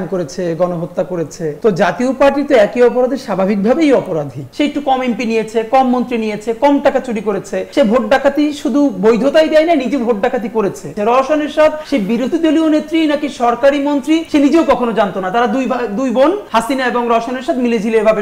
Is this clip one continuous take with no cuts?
no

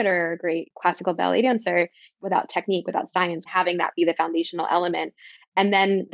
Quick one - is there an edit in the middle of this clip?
yes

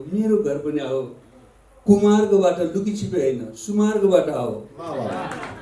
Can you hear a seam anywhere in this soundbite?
no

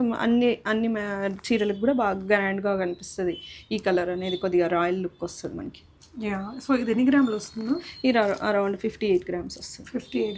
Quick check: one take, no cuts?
yes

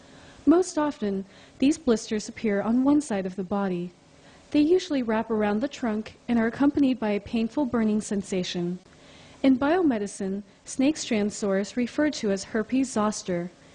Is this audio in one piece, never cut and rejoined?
yes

